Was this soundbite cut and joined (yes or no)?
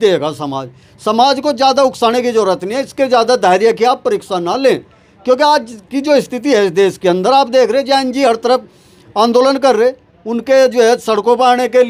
no